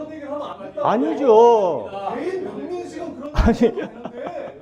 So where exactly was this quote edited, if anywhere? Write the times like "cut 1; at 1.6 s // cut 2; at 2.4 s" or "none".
none